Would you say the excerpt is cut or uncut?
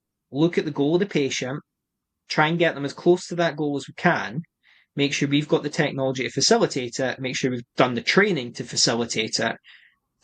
uncut